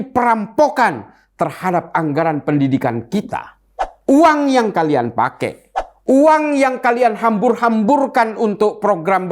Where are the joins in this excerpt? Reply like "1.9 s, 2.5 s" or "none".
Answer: 3.9 s